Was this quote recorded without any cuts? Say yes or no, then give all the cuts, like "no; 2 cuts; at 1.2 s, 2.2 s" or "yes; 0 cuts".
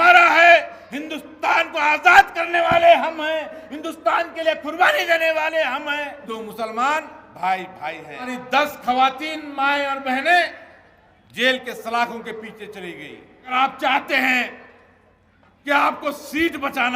no; 3 cuts; at 6.2 s, 8.3 s, 13.5 s